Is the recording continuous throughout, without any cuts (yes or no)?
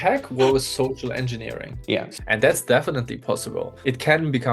no